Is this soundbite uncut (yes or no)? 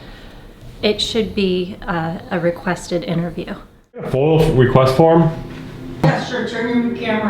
no